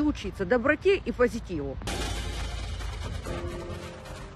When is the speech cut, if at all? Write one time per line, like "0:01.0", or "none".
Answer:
0:01.8